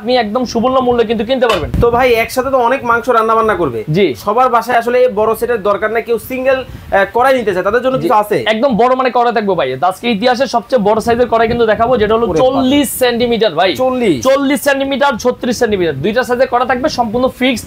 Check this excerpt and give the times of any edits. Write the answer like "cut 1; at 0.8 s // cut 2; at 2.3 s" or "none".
cut 1; at 1.7 s